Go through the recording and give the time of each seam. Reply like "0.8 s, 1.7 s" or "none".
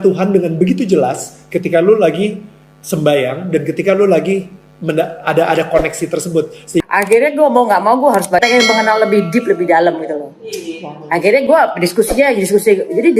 6.8 s, 8.4 s